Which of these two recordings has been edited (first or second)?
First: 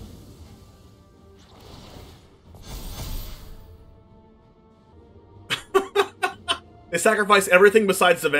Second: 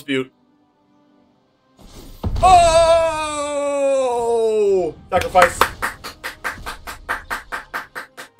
first